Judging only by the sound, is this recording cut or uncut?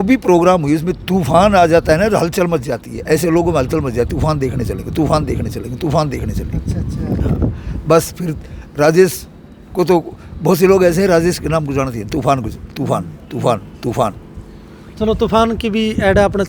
uncut